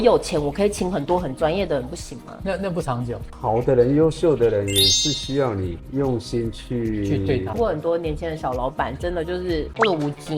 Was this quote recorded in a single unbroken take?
no; 1 cut; at 7.5 s

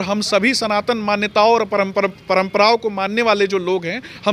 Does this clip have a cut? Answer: no; 0 cuts

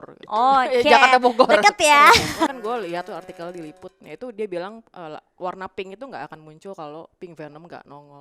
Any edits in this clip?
yes; 1 cut; at 2.5 s

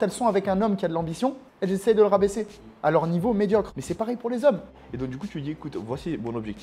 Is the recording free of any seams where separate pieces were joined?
no; 3 cuts; at 1.5 s, 3.8 s, 4.8 s

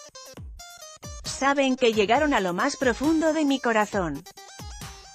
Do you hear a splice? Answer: yes; 2 cuts; at 1.4 s, 4.2 s

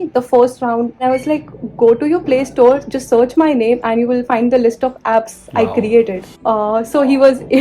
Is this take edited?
yes; 1 cut; at 1.0 s

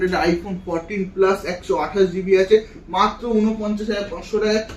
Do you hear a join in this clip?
no; 0 cuts

